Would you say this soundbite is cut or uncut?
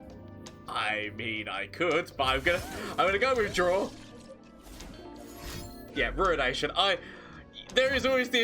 cut